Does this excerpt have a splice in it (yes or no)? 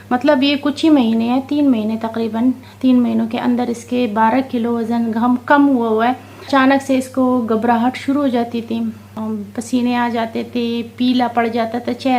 yes